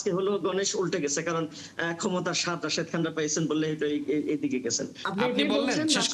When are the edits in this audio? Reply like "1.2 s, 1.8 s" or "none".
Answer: 4.9 s